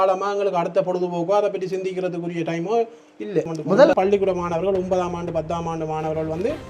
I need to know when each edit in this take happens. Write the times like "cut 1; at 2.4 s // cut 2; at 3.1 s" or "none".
cut 1; at 3.9 s